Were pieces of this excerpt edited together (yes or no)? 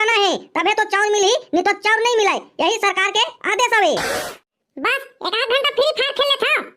yes